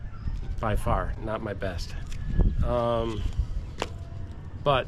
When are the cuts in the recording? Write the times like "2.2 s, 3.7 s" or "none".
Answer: none